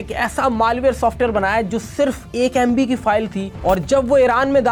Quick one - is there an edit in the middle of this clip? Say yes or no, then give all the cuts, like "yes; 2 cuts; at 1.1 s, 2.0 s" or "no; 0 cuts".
no; 0 cuts